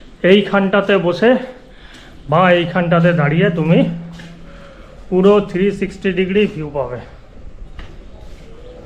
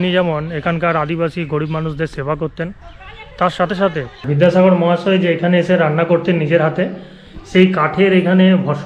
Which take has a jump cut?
second; 1 cut; at 4.1 s

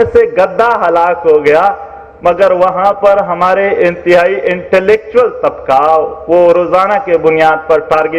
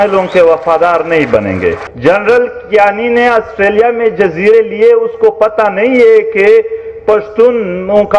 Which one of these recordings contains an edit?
second; 1 cut; at 1.9 s

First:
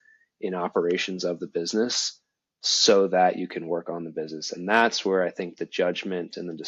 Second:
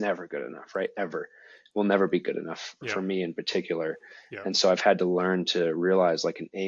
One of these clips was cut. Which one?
second; 1 cut; at 2.8 s

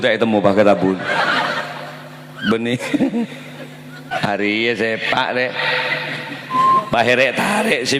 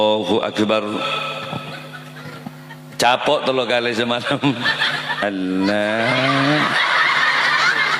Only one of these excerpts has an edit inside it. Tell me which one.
first; 1 cut; at 4.1 s

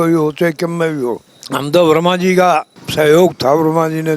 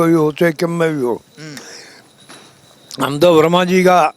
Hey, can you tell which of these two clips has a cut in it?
first; 2 cuts; at 1.3 s, 2.8 s

